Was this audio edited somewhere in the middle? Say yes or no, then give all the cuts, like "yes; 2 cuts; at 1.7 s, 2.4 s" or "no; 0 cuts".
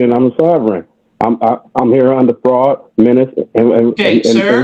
no; 0 cuts